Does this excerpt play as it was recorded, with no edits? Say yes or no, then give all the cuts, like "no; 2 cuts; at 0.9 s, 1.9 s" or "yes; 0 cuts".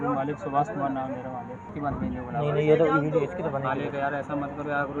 no; 1 cut; at 1.7 s